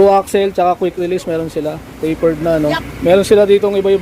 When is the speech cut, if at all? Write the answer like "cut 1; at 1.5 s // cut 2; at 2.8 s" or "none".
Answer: cut 1; at 2.8 s